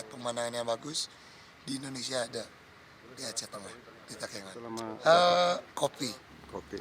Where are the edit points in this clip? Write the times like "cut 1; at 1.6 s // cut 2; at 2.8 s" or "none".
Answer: cut 1; at 4.9 s